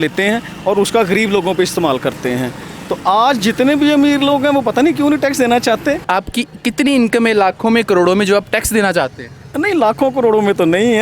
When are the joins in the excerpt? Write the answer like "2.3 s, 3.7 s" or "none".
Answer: 6.1 s

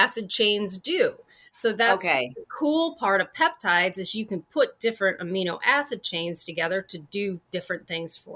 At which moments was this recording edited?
none

